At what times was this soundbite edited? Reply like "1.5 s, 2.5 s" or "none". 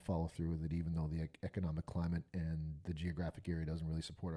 none